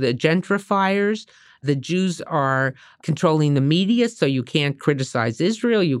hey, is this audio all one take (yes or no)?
no